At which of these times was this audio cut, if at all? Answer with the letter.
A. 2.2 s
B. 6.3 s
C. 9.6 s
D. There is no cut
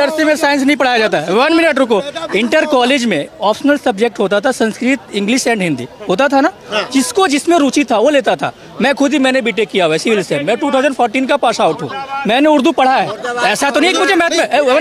D